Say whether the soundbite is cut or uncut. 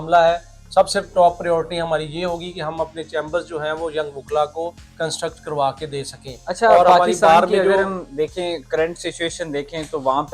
uncut